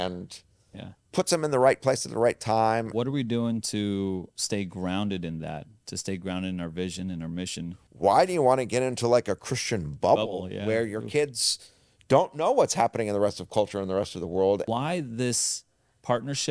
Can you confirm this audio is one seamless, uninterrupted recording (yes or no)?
no